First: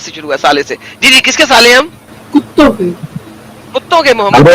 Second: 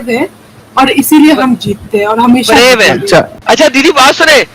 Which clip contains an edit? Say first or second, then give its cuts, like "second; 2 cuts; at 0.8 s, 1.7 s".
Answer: second; 1 cut; at 3.3 s